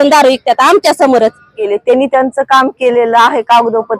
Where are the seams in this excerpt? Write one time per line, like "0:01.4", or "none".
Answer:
0:01.6